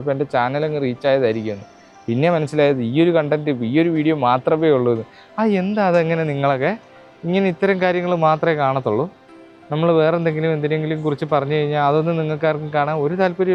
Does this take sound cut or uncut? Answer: uncut